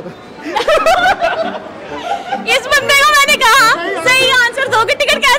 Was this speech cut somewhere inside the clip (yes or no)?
no